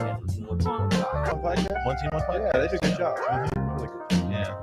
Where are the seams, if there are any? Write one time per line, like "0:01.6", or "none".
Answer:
0:01.3